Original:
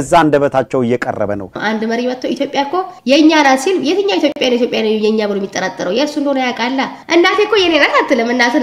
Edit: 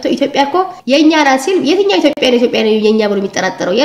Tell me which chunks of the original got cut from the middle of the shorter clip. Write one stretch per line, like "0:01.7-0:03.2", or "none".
none